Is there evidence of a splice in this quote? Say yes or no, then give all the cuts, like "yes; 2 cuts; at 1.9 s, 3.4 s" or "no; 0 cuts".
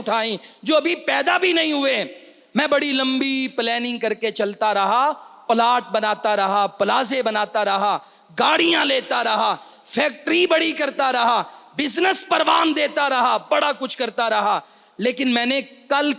no; 0 cuts